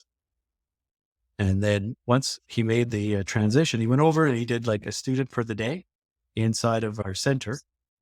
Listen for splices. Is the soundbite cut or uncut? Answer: cut